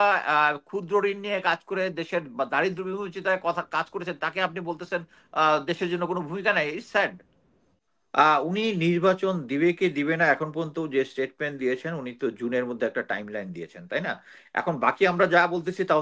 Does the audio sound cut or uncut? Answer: uncut